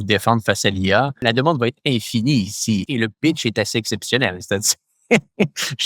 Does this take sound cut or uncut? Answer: cut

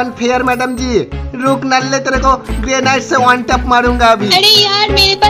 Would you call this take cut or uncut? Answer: uncut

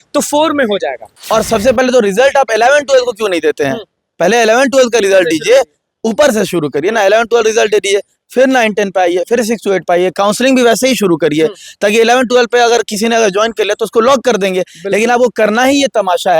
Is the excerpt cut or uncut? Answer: cut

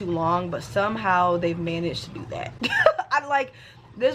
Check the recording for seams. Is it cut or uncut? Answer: uncut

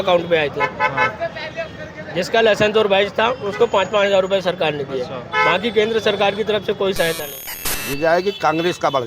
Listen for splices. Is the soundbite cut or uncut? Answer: cut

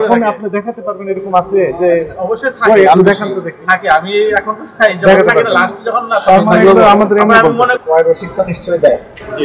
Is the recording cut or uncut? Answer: cut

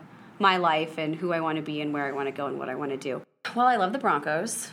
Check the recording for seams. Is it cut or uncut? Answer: cut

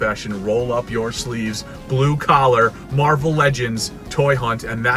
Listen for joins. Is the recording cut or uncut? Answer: uncut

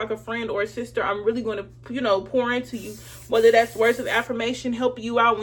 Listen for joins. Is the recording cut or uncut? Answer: uncut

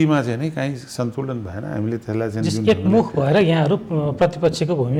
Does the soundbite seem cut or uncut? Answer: uncut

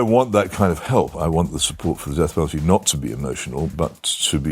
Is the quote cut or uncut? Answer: cut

